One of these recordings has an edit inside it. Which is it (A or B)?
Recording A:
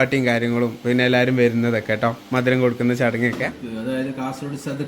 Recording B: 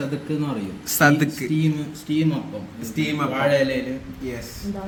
A